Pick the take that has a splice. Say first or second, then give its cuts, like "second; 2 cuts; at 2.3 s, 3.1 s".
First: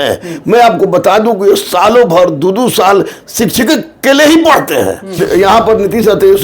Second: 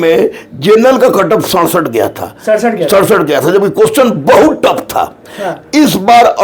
first; 1 cut; at 5.1 s